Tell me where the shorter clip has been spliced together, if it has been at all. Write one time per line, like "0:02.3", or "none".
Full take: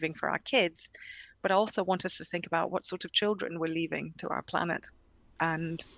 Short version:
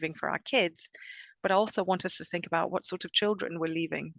none